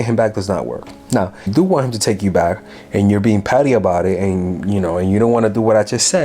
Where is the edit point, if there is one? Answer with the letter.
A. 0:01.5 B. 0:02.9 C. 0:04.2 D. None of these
A